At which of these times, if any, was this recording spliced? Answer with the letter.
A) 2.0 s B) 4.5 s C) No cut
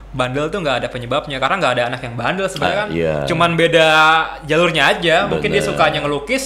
C